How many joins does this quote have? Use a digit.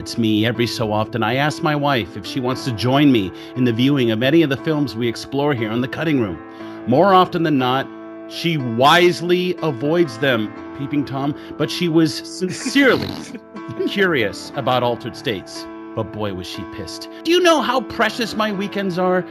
0